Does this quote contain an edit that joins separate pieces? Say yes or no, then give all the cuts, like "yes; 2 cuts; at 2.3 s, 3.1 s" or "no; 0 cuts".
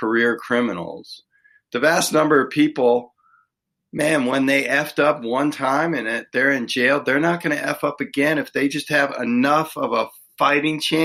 no; 0 cuts